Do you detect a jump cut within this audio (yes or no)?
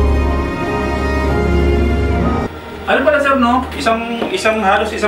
yes